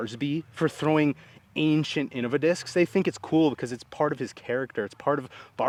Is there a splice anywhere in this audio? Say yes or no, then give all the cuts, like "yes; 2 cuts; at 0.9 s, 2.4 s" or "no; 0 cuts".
no; 0 cuts